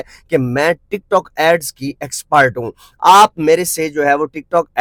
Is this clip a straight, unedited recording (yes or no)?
yes